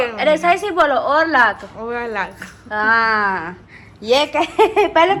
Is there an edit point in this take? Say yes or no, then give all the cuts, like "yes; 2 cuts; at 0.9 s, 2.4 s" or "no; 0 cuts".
no; 0 cuts